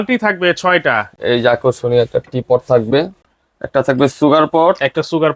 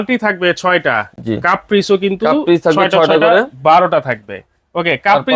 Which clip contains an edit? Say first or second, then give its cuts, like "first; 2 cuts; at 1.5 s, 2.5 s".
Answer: first; 2 cuts; at 1.1 s, 3.2 s